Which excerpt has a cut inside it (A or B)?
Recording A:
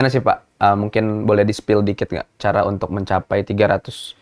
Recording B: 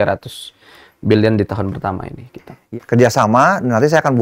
B